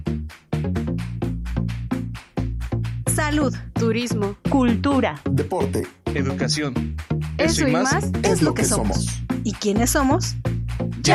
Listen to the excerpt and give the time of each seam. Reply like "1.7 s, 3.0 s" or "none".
none